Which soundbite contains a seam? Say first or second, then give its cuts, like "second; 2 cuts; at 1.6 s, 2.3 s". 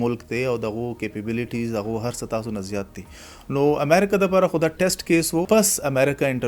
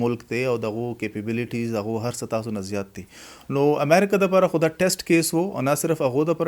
first; 1 cut; at 5.4 s